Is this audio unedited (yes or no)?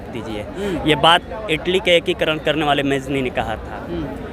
yes